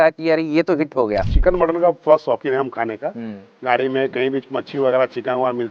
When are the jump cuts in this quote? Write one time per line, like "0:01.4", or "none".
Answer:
0:01.3